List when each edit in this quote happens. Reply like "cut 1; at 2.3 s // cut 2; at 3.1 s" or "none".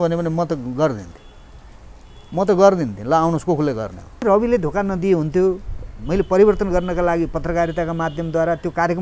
cut 1; at 4.2 s